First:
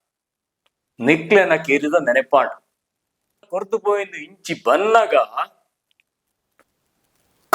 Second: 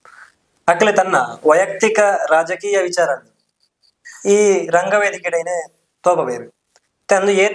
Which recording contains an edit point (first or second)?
first